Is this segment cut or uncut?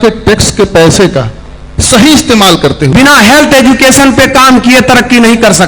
cut